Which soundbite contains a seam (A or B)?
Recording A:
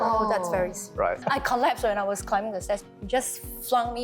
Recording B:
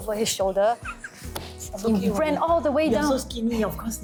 A